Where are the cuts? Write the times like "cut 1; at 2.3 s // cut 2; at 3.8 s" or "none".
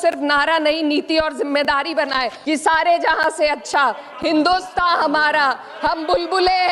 cut 1; at 2.4 s